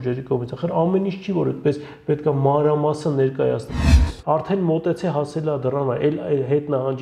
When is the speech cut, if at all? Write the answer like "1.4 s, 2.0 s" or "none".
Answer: 4.0 s